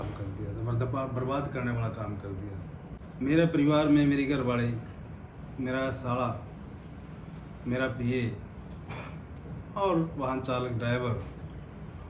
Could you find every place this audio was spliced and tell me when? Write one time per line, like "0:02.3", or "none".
0:03.0